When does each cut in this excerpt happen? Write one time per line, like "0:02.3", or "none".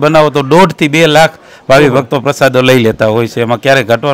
none